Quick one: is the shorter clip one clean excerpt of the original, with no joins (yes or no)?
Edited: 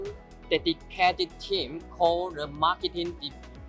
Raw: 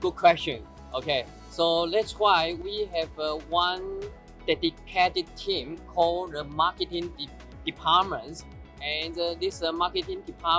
yes